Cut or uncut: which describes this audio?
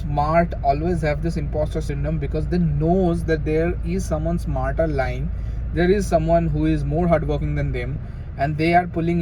uncut